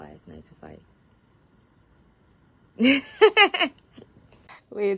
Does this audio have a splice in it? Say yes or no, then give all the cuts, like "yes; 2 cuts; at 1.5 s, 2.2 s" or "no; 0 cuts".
no; 0 cuts